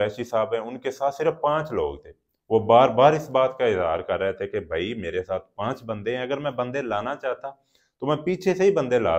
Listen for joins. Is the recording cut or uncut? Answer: uncut